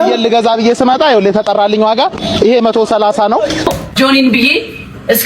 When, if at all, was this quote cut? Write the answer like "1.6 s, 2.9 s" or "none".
3.6 s